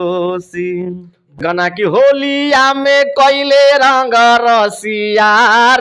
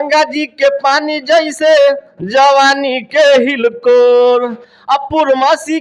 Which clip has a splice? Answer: first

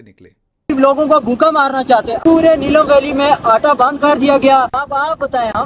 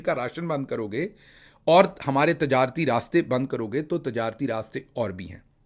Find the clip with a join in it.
first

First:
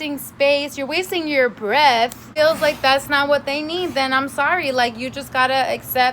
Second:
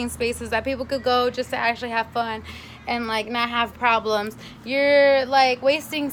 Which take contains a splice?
first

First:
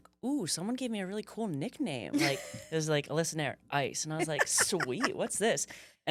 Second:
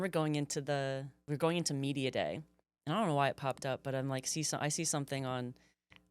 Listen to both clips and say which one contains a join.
second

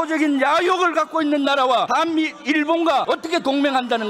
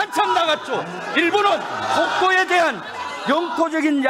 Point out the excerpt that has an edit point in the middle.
first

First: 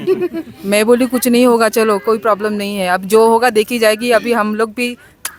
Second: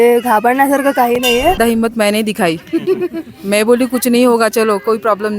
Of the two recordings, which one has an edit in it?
second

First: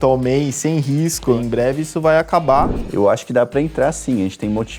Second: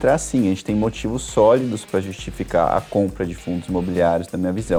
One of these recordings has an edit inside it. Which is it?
first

